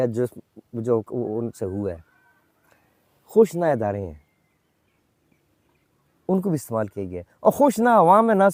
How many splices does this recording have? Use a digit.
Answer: 0